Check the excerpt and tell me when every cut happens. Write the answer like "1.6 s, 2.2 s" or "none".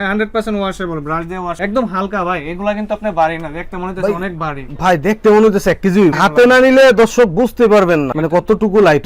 1.5 s